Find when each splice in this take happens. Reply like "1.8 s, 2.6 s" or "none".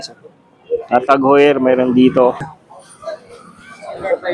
2.4 s